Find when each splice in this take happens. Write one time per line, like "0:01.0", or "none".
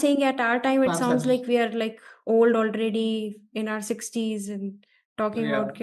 none